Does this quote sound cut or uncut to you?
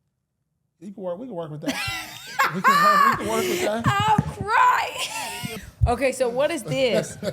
cut